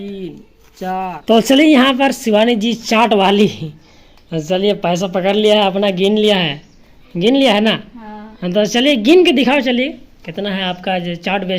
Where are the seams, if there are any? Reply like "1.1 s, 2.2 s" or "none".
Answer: 1.2 s